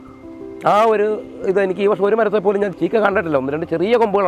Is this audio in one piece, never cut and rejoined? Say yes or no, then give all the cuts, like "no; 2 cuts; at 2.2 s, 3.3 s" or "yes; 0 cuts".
no; 1 cut; at 2.7 s